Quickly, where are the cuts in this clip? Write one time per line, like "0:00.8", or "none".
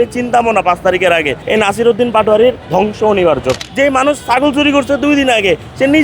0:01.4
0:02.6
0:03.6